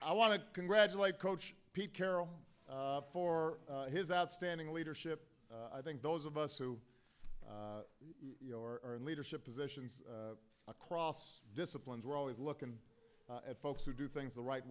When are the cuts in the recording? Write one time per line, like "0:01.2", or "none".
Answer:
0:09.0